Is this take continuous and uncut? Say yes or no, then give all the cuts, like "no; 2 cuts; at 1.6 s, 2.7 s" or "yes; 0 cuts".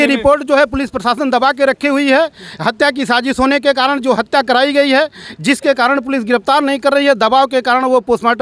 yes; 0 cuts